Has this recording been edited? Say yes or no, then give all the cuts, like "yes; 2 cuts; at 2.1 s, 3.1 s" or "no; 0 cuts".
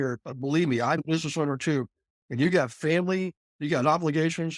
yes; 1 cut; at 1.0 s